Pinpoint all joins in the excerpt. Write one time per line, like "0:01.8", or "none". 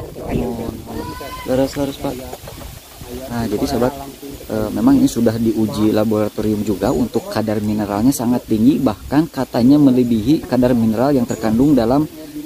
none